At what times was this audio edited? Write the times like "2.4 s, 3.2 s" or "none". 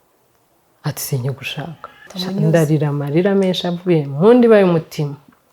2.1 s